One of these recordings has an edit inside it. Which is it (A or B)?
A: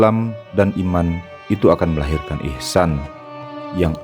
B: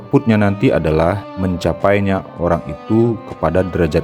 B